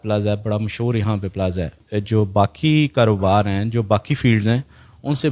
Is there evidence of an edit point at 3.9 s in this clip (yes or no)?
no